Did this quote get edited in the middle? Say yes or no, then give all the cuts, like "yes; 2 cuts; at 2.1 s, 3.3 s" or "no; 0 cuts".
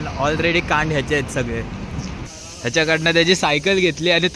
yes; 1 cut; at 2.3 s